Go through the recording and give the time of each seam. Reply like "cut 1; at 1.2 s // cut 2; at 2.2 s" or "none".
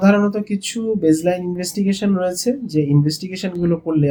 none